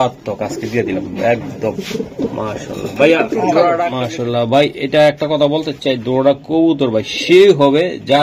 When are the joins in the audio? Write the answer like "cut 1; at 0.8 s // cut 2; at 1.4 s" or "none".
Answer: cut 1; at 3.9 s

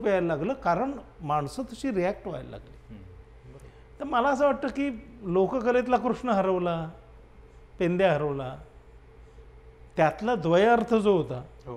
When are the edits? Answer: none

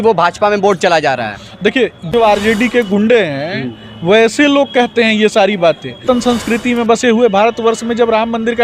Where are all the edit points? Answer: cut 1; at 2.1 s // cut 2; at 6.0 s

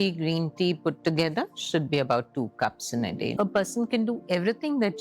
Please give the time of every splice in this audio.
cut 1; at 3.3 s

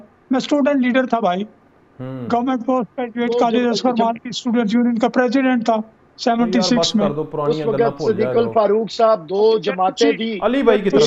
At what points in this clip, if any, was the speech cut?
none

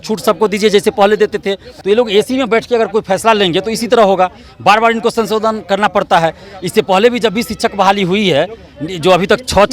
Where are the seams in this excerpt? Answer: cut 1; at 1.7 s

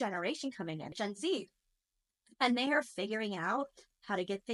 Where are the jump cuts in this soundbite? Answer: cut 1; at 0.9 s

